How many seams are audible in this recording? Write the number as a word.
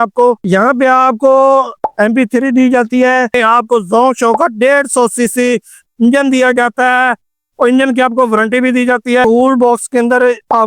two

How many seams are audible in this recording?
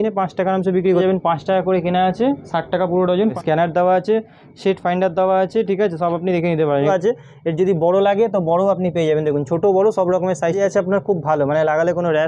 four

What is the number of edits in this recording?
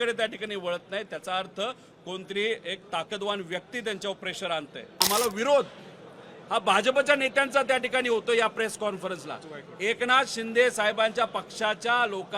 one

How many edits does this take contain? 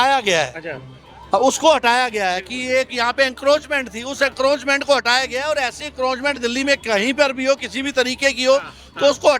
zero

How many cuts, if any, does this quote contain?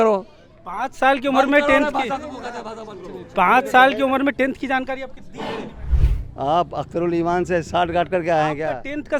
one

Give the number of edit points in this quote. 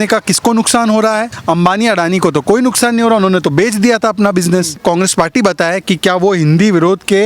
two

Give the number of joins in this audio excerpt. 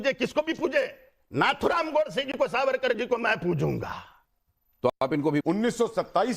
one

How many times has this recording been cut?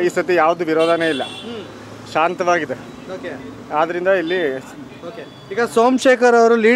zero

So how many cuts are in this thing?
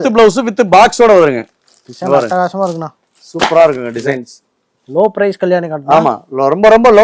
one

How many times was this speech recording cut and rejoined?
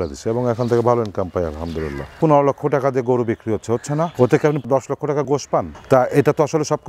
two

